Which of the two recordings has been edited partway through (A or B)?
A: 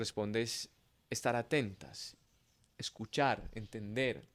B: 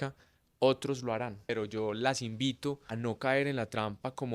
B